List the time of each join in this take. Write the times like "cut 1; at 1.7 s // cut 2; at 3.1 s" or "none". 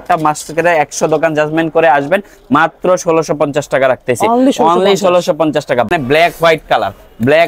cut 1; at 5.9 s